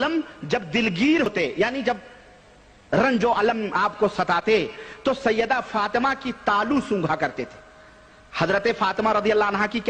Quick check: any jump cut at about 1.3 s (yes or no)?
yes